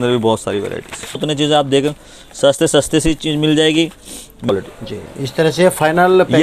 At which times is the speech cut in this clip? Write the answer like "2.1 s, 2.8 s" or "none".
1.2 s, 4.5 s